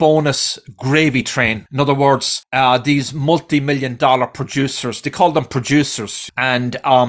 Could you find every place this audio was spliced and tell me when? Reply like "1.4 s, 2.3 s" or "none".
1.6 s, 2.4 s